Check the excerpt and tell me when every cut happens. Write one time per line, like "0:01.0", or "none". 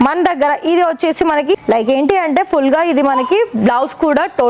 0:01.6